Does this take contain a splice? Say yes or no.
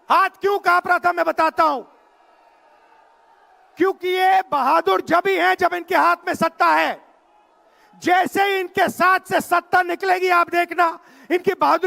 no